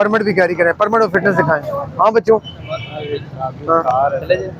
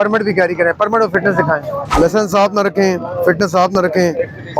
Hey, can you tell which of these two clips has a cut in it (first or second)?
second